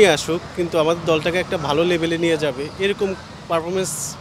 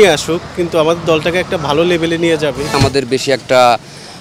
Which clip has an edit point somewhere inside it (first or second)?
second